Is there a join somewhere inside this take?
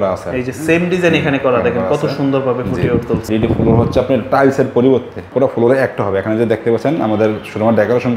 yes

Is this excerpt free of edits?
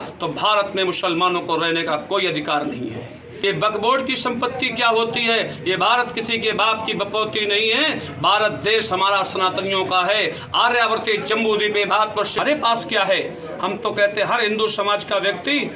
no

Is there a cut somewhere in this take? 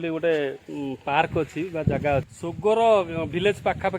yes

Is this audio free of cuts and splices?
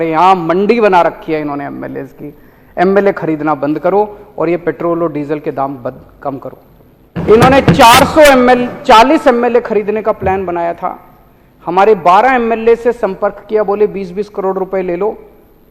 no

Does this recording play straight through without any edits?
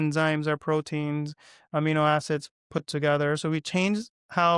yes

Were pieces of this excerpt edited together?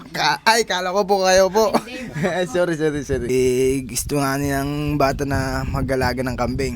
yes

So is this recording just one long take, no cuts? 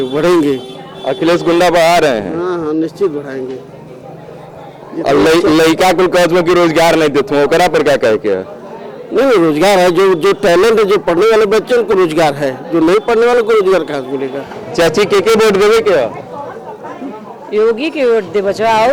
yes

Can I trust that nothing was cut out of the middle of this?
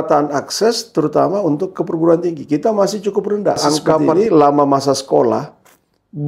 no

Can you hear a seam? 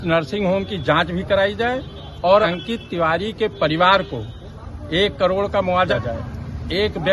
yes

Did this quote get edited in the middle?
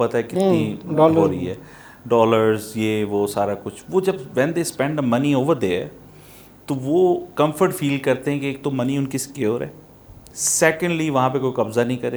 no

